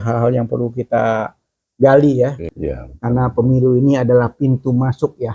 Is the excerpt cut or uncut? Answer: cut